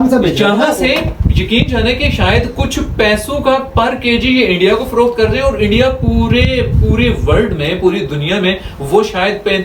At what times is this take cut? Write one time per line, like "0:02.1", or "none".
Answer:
none